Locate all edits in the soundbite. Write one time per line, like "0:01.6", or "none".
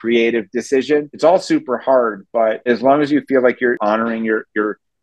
0:01.1
0:02.7
0:03.8